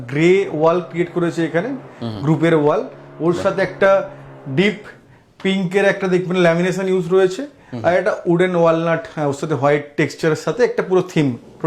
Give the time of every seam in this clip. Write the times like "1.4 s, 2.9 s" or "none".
none

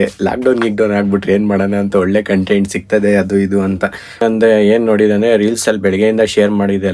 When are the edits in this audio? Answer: 4.2 s

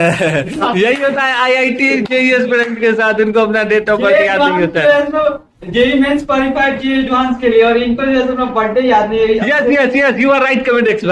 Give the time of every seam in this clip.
none

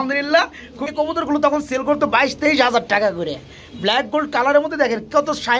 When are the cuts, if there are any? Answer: 1.0 s

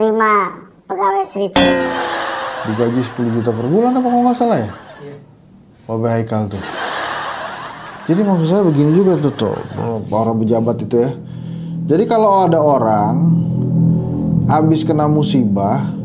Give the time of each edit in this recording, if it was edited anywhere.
none

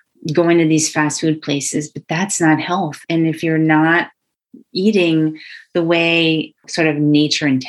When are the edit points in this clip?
3.0 s, 6.7 s

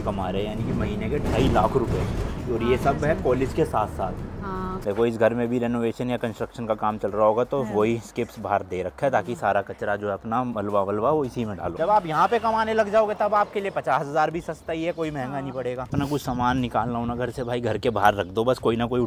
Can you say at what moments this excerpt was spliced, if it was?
4.8 s, 11.7 s, 15.9 s

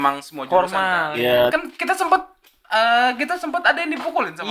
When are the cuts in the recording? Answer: 1.5 s

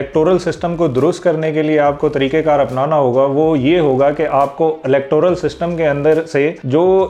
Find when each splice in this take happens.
none

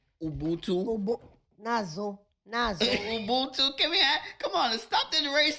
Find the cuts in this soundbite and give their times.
none

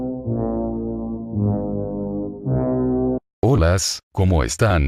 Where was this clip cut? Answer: 2.2 s

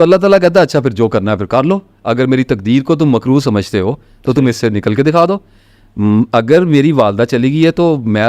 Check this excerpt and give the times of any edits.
none

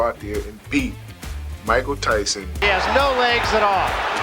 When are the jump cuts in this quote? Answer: 2.6 s

